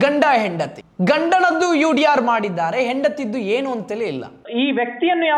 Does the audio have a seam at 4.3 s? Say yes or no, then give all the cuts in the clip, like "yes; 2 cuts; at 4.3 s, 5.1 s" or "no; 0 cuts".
yes; 1 cut; at 4.3 s